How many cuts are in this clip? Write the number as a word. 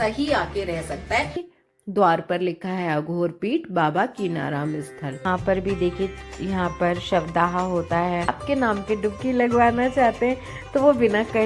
three